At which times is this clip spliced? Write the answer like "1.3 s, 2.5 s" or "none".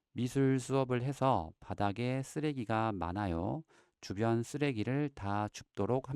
none